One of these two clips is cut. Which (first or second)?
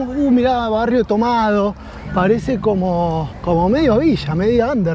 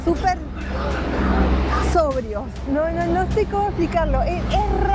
first